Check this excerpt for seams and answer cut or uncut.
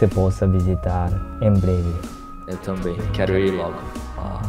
uncut